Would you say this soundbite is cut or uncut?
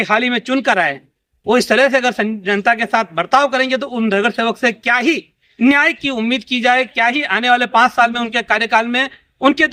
uncut